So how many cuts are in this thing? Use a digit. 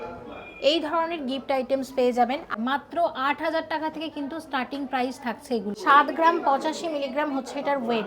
2